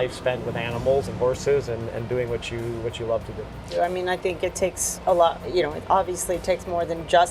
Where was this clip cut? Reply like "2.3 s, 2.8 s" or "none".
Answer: 3.7 s